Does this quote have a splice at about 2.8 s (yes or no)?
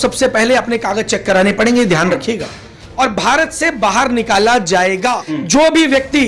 yes